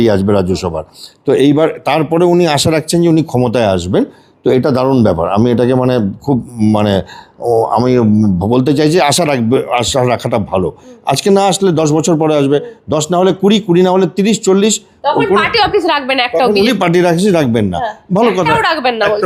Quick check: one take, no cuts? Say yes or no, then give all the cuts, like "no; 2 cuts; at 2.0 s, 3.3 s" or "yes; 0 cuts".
yes; 0 cuts